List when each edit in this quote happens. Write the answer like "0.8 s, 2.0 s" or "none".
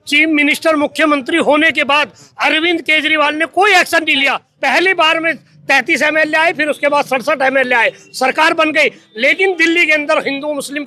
4.5 s